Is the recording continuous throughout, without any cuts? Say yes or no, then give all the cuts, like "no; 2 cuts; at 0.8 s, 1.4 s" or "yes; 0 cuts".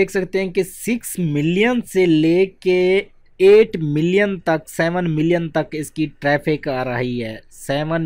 no; 1 cut; at 3.2 s